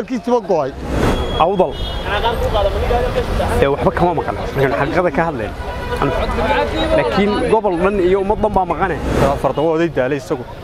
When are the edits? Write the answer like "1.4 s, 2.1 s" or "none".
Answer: 1.1 s, 9.1 s